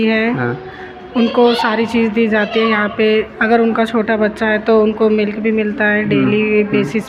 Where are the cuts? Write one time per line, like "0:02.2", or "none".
none